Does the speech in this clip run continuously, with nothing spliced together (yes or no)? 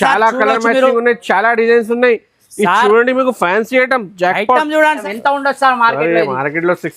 no